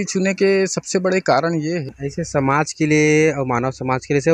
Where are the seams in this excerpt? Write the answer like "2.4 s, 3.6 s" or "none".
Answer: 1.9 s